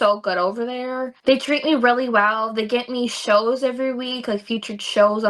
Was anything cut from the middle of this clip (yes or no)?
yes